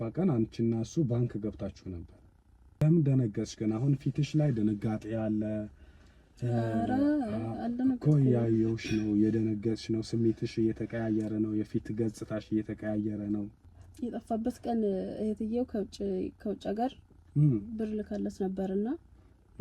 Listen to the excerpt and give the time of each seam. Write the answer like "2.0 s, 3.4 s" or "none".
2.8 s, 13.6 s